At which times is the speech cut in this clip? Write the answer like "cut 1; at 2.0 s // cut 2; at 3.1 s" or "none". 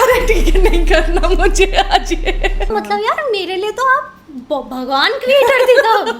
cut 1; at 2.7 s